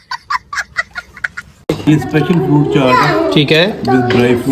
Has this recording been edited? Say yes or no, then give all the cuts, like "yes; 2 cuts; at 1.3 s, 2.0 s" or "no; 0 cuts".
yes; 1 cut; at 1.9 s